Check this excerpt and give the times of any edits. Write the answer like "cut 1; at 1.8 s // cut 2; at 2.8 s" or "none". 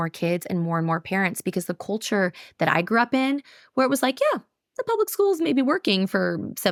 none